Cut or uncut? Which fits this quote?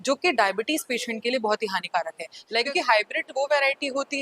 cut